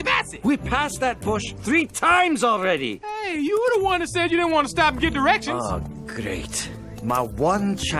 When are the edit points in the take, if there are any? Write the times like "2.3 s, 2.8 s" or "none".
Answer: 6.0 s